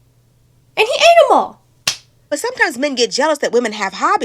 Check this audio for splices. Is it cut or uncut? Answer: cut